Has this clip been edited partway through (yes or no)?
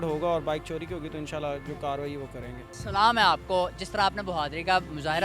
no